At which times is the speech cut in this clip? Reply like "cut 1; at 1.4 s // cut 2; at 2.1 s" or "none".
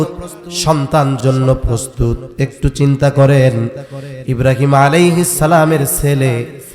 cut 1; at 1.2 s